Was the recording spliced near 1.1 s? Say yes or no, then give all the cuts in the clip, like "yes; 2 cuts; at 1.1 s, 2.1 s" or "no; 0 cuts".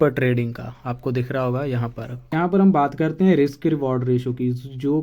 no; 1 cut; at 2.3 s